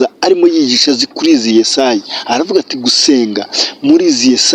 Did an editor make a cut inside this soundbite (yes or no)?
no